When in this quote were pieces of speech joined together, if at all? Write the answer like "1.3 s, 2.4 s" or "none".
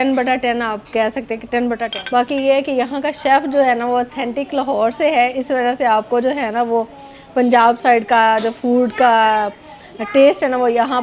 1.9 s